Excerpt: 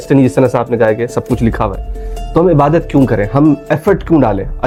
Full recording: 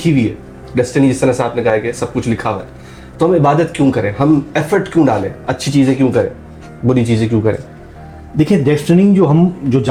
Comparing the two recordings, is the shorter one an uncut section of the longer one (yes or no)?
yes